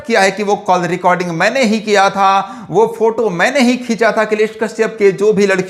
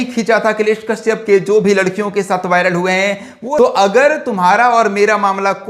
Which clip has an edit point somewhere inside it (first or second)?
second